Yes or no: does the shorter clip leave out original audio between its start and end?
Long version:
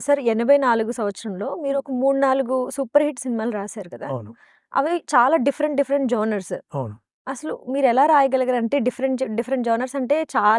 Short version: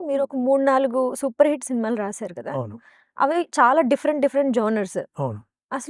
no